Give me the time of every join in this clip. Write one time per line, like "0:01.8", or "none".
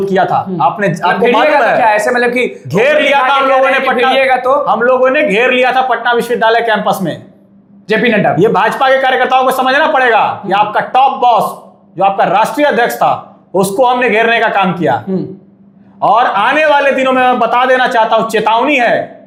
none